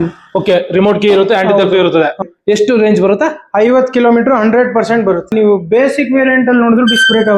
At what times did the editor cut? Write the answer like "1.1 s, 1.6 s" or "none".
2.2 s, 5.3 s

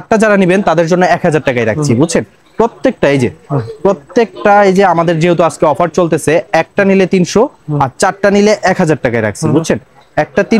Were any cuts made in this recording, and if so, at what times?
none

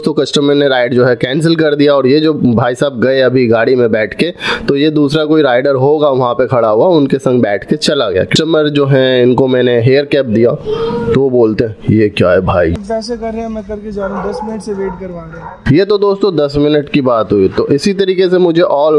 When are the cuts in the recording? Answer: 8.3 s, 12.8 s

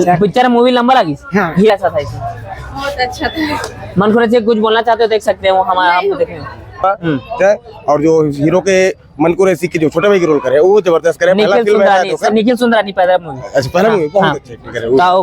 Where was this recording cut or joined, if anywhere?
1.7 s, 6.8 s

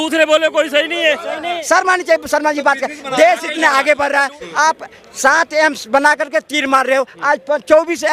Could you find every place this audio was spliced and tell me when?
1.6 s, 4.4 s

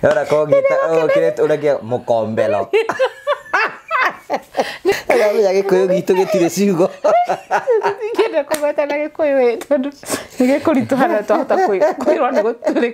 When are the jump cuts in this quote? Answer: 4.9 s

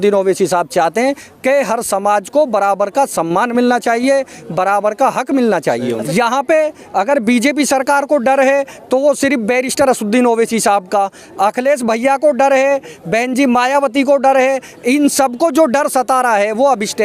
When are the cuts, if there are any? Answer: 6.0 s

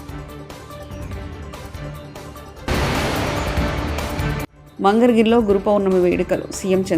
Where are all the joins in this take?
2.6 s, 4.6 s

